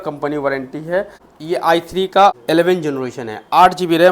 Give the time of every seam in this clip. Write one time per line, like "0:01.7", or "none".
0:01.3
0:02.3